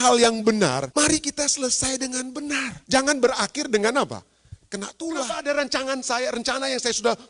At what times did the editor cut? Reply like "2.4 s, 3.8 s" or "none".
0.9 s, 2.8 s, 5.2 s

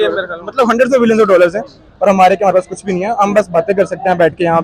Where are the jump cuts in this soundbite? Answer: none

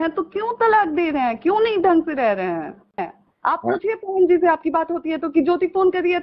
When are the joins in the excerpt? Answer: 3.2 s

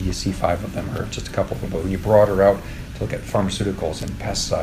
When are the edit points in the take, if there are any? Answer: none

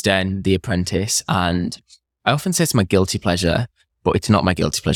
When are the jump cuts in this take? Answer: none

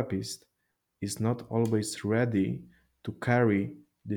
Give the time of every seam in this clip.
none

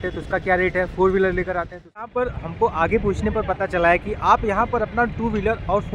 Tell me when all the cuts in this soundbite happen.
2.1 s

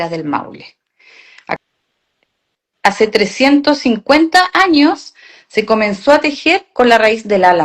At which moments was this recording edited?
1.6 s

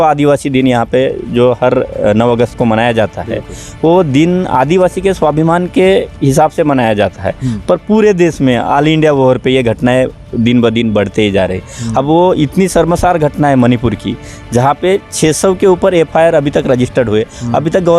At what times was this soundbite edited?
none

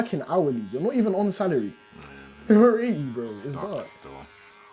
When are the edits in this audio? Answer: none

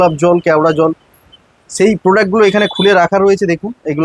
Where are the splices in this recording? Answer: none

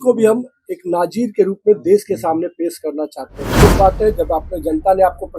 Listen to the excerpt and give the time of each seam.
3.6 s

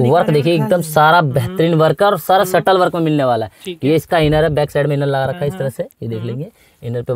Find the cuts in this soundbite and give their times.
none

